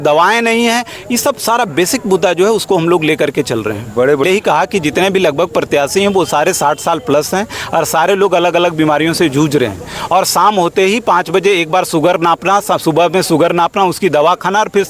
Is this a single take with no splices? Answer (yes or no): no